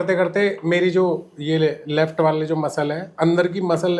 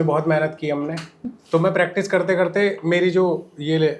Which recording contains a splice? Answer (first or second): second